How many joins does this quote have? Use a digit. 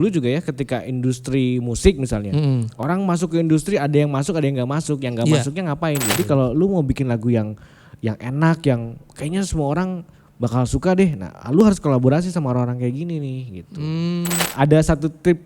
2